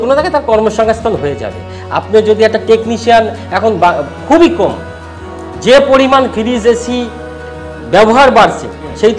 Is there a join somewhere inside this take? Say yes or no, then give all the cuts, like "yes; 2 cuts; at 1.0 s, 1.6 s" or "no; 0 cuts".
no; 0 cuts